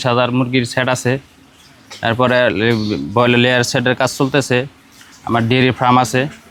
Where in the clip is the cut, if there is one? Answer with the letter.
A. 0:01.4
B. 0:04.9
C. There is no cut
C